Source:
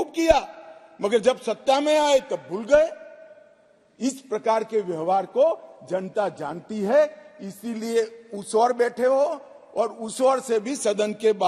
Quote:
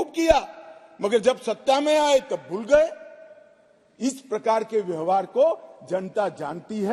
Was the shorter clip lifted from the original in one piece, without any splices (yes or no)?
yes